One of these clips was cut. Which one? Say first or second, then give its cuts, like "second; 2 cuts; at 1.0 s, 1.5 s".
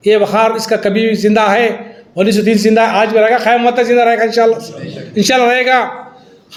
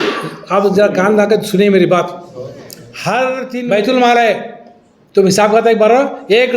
second; 1 cut; at 3.5 s